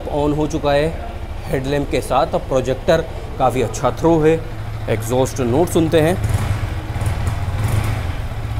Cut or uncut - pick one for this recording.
uncut